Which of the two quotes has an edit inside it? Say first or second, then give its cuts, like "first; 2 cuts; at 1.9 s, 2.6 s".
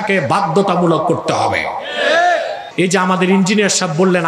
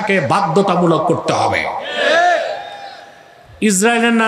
first; 1 cut; at 2.6 s